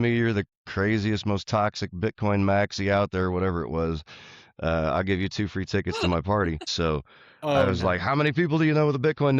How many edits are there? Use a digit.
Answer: 1